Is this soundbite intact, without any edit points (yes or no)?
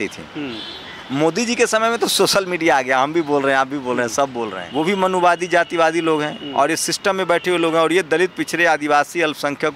no